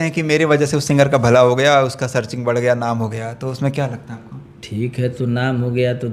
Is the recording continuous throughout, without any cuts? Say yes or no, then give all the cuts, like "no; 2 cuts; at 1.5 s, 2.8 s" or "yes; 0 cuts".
yes; 0 cuts